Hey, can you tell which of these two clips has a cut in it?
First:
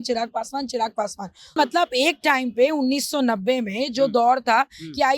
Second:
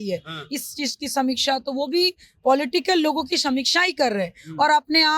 first; 1 cut; at 1.5 s

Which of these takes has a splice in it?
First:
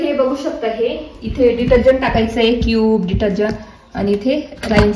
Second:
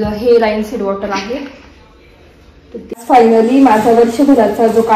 second; 1 cut; at 3.1 s

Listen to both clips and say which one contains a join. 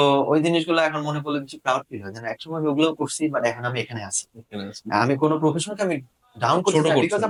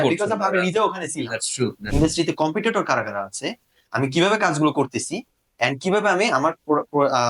second; 1 cut; at 1.8 s

